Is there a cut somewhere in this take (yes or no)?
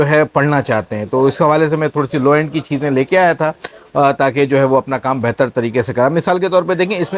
no